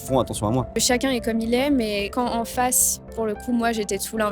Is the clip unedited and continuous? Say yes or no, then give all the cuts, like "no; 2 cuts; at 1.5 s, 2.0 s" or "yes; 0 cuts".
no; 2 cuts; at 0.8 s, 2.1 s